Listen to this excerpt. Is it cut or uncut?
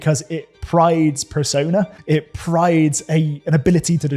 cut